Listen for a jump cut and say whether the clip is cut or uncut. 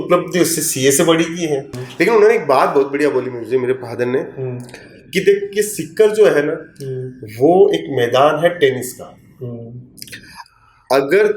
cut